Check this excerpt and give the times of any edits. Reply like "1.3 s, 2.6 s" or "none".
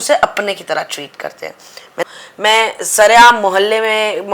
2.0 s